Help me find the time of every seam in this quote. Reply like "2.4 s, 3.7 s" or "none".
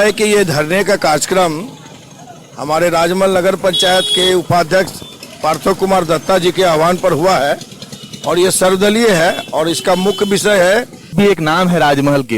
11.1 s